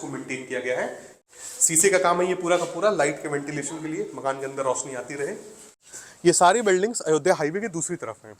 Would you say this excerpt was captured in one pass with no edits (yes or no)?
no